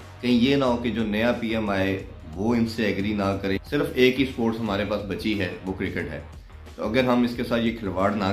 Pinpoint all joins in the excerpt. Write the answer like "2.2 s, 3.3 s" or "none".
3.6 s